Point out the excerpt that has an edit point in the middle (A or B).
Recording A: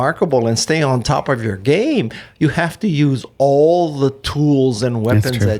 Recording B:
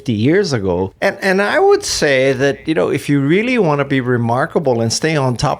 B